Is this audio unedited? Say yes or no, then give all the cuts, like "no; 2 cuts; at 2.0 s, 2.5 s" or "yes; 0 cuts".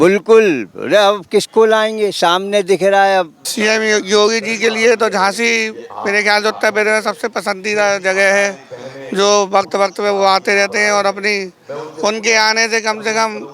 no; 1 cut; at 3.4 s